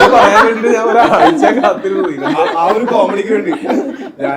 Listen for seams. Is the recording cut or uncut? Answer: uncut